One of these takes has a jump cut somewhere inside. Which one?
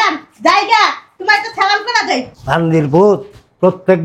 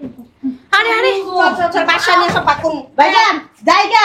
first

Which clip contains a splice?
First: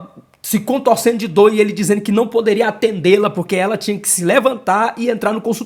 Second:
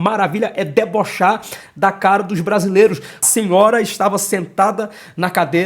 second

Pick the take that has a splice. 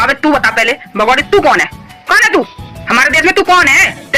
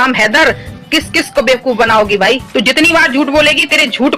second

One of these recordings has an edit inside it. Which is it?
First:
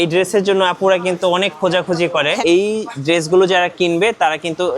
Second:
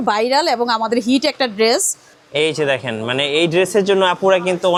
first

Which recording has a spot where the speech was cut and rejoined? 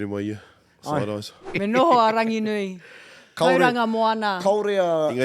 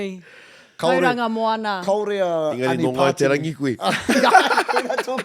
first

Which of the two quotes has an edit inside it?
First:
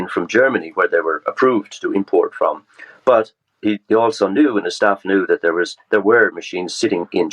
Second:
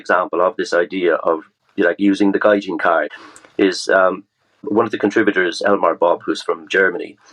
second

